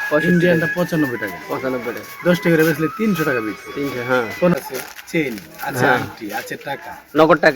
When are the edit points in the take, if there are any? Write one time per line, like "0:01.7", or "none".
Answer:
0:04.5